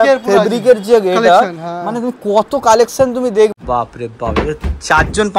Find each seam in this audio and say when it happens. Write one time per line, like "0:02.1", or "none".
0:03.5